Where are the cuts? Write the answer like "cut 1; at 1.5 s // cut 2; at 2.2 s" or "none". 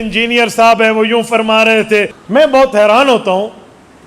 cut 1; at 2.2 s